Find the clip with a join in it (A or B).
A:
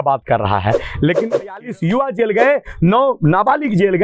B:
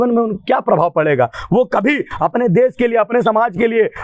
A